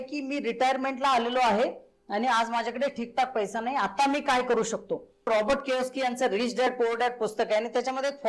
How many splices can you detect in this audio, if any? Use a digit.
1